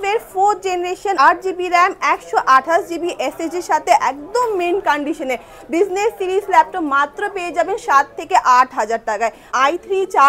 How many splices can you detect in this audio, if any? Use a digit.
2